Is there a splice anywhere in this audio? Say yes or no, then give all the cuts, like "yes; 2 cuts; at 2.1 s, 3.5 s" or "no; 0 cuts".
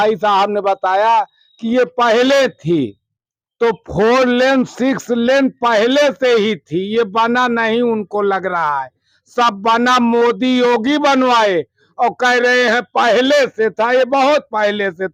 no; 0 cuts